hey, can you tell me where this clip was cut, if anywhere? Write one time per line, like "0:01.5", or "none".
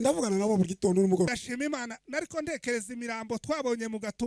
0:01.3